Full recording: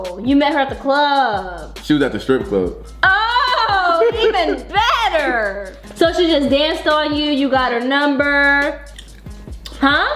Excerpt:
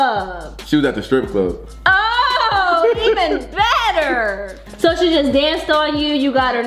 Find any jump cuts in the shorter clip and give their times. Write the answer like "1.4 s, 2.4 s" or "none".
none